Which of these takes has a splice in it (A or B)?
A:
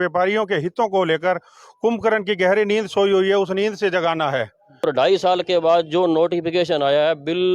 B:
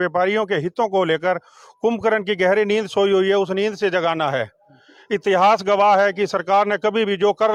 A